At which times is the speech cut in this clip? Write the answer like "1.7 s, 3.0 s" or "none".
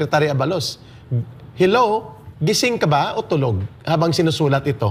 none